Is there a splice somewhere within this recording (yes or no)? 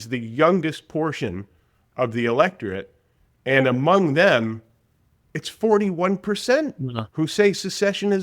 no